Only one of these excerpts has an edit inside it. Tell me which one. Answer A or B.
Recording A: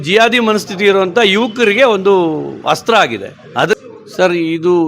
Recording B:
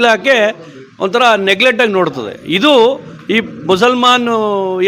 A